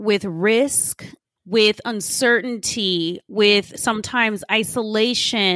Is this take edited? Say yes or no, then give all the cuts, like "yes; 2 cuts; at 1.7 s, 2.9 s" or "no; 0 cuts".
no; 0 cuts